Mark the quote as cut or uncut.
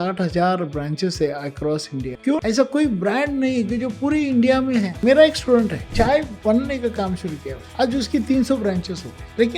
cut